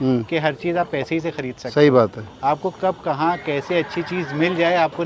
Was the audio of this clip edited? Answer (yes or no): no